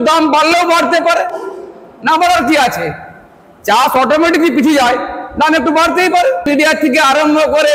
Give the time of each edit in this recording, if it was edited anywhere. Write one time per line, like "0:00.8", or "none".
0:06.5